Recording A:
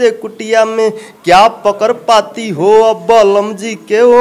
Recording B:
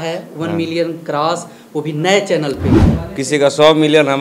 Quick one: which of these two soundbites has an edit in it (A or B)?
B